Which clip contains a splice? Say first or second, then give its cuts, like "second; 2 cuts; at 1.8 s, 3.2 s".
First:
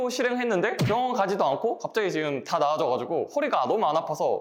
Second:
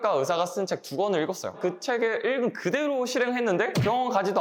second; 1 cut; at 1.6 s